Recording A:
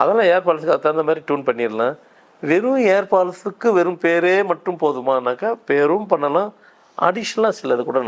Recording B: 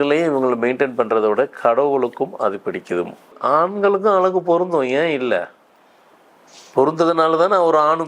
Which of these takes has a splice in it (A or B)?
B